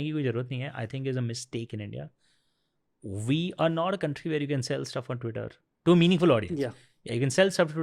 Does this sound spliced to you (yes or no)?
no